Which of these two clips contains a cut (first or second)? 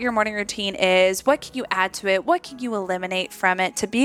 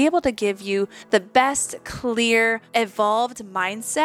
second